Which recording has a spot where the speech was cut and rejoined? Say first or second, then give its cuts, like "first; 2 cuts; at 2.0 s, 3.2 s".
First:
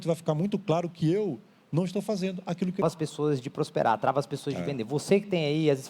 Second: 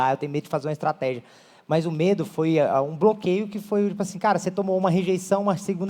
first; 1 cut; at 2.8 s